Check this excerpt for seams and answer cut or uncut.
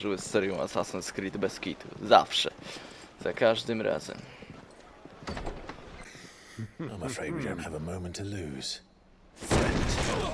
cut